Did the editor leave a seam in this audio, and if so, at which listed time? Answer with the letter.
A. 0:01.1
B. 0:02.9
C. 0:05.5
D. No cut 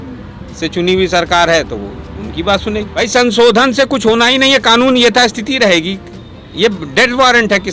B